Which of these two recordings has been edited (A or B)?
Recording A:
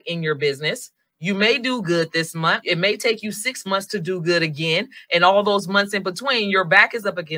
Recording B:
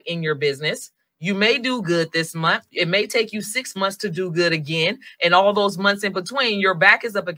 A